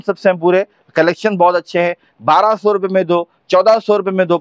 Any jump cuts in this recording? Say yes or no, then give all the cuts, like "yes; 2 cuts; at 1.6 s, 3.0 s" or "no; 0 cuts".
no; 0 cuts